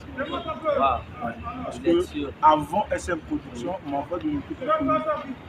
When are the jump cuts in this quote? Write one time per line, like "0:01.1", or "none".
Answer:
none